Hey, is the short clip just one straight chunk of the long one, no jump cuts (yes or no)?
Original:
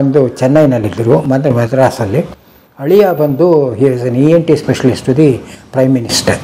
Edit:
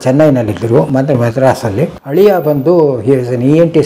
no